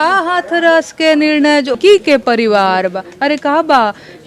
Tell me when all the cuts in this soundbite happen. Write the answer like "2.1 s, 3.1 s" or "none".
1.8 s